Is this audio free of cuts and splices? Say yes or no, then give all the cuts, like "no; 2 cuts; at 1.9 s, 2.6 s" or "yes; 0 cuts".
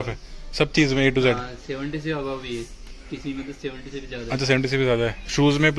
yes; 0 cuts